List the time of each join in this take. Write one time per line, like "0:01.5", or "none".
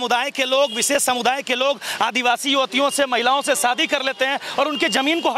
none